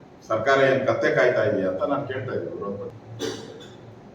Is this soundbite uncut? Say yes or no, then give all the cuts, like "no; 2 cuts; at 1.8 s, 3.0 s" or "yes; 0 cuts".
no; 1 cut; at 2.9 s